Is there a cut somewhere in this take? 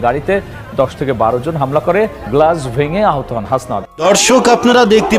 yes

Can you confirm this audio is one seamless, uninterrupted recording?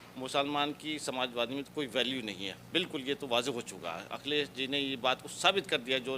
yes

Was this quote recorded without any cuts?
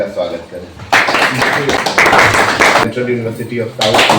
no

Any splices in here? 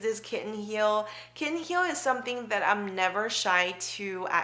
no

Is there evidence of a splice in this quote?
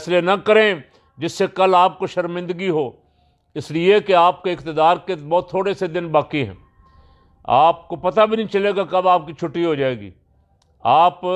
no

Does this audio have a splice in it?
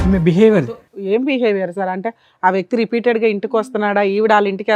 no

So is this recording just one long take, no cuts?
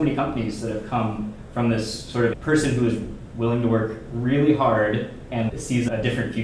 no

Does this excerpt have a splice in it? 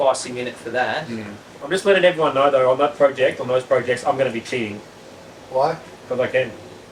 no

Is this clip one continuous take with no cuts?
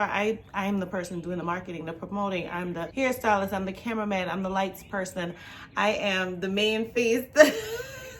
no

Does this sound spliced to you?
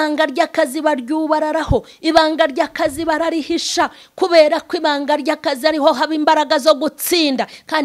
no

